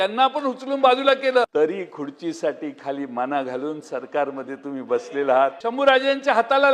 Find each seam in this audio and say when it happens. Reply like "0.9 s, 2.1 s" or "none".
1.5 s, 5.6 s